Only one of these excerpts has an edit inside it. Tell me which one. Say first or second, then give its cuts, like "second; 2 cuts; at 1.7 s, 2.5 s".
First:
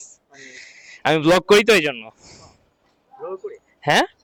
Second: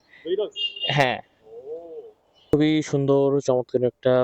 second; 1 cut; at 2.5 s